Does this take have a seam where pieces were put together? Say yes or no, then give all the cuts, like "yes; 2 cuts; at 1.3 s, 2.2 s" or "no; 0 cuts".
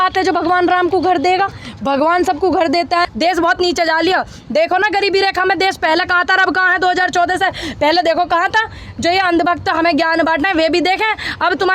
yes; 1 cut; at 3.0 s